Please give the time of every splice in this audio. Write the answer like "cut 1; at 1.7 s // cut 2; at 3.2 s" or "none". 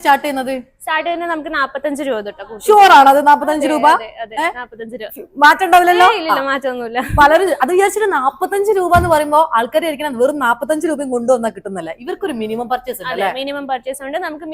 none